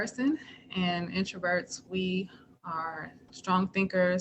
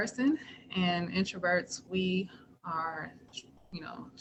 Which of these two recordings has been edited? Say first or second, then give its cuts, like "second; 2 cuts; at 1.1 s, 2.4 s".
first; 1 cut; at 3.2 s